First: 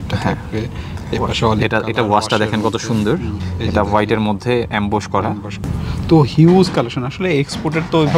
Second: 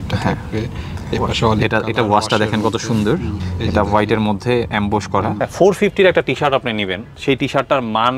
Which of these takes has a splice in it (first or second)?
second